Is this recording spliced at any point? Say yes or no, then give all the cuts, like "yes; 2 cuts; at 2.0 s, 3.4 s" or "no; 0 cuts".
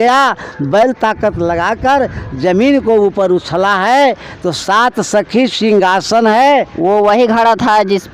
no; 0 cuts